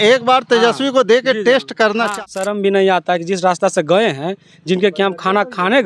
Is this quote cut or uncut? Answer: cut